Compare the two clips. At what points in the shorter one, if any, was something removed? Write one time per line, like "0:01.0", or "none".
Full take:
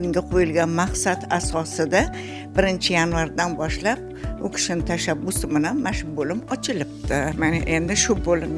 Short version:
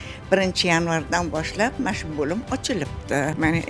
0:01.8